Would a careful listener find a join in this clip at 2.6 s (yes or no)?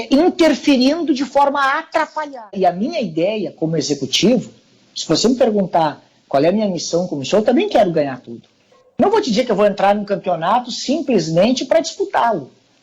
yes